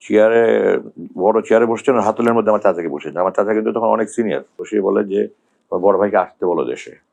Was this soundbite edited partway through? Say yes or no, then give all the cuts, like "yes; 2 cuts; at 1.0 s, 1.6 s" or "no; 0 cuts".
yes; 1 cut; at 4.6 s